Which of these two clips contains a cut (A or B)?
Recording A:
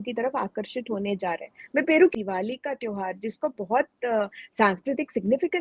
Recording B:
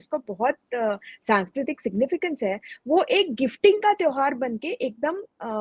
A